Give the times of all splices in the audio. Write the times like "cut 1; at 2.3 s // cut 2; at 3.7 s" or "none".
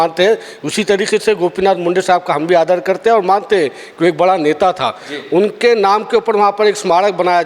none

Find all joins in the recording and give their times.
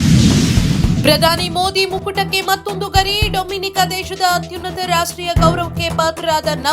cut 1; at 1.0 s

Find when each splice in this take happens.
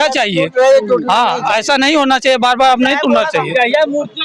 none

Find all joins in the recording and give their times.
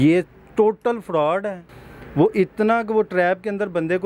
none

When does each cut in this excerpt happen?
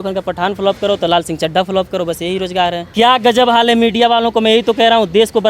cut 1; at 2.8 s

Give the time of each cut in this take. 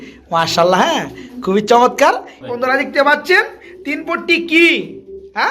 cut 1; at 2.3 s

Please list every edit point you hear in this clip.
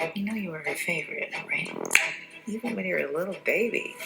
none

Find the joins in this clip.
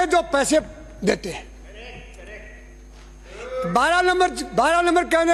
none

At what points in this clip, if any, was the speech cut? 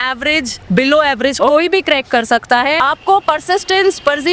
cut 1; at 2.8 s

